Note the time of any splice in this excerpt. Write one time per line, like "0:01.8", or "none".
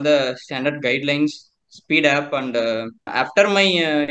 0:03.1

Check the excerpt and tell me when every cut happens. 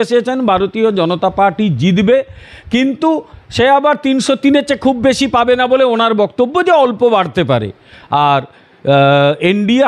none

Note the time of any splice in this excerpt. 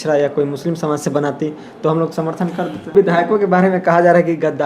0:02.9

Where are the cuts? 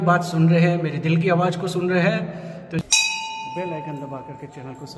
0:02.8

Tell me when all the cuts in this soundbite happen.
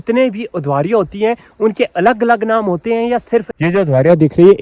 0:03.5

